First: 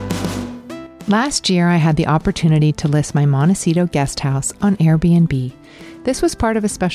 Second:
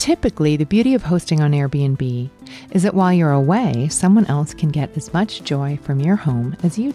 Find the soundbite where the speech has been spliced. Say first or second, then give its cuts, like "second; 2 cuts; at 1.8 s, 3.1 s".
first; 1 cut; at 0.9 s